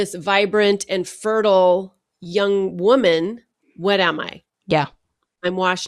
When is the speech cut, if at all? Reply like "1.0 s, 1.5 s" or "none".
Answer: none